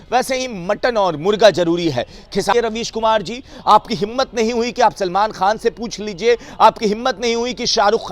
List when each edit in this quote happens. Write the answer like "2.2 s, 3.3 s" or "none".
2.5 s